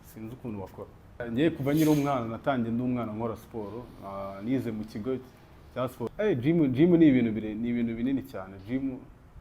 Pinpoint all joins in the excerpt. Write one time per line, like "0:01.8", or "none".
0:01.3
0:06.0